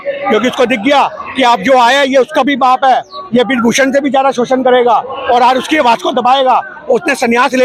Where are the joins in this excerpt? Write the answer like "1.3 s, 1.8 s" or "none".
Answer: none